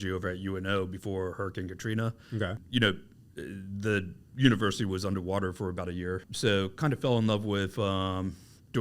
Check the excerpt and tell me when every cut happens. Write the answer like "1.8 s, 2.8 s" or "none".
2.6 s, 6.3 s